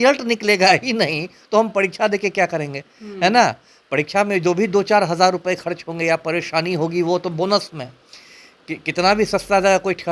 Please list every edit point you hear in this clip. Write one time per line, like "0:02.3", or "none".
none